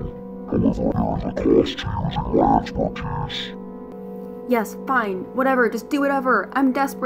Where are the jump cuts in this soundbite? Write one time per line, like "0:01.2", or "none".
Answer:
0:00.9
0:03.9